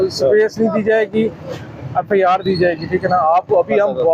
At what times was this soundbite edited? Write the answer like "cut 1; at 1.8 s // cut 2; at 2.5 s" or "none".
none